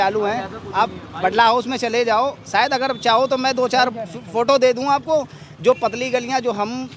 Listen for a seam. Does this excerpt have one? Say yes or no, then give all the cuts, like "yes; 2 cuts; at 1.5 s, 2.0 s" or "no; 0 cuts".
no; 0 cuts